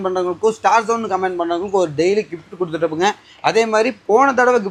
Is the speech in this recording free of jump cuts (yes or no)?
yes